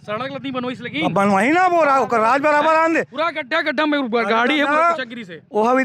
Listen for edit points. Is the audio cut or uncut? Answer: uncut